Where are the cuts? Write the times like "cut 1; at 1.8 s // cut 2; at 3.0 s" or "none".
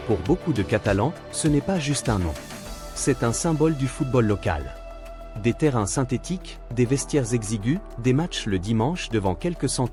none